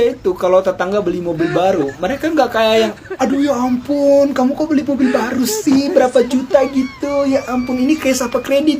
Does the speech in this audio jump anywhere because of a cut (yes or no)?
no